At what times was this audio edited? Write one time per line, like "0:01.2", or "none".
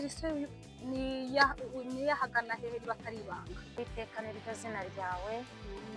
0:03.8